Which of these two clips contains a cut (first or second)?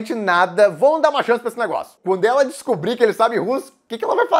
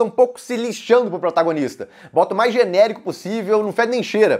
first